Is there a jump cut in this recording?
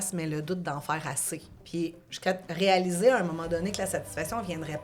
yes; 1 cut; at 1.6 s

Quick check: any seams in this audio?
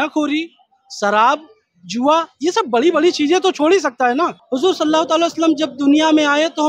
yes; 1 cut; at 4.4 s

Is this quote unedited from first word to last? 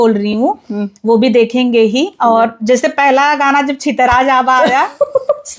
yes; 0 cuts

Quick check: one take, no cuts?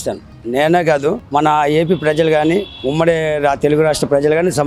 yes; 0 cuts

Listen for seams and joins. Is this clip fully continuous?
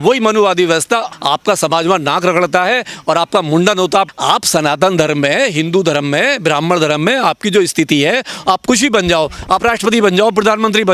no; 1 cut; at 4.1 s

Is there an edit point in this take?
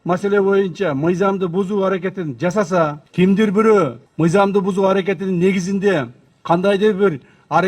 yes; 2 cuts; at 3.0 s, 4.0 s

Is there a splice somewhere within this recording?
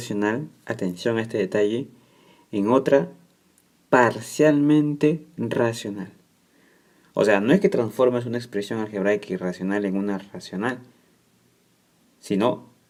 no; 0 cuts

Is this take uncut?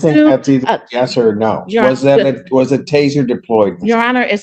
yes; 0 cuts

